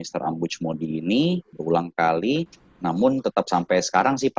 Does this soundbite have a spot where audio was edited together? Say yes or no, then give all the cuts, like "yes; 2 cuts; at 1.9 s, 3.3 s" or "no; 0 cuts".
yes; 2 cuts; at 1.5 s, 2.6 s